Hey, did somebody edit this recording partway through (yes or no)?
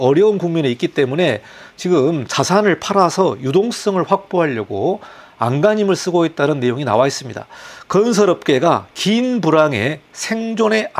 no